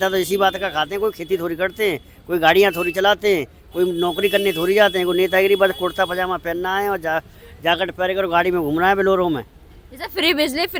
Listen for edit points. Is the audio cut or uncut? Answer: uncut